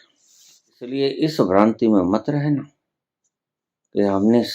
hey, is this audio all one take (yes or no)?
no